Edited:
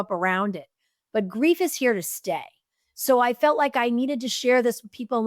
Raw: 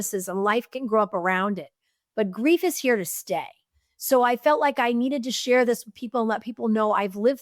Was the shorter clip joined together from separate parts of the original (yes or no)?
no